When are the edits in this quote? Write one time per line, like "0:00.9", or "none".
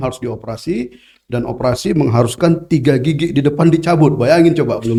none